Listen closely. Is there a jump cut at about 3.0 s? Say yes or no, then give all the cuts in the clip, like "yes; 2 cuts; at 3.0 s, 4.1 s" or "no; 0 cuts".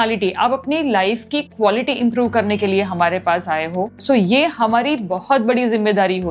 no; 0 cuts